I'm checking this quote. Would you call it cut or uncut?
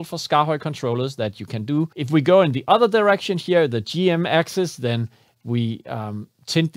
cut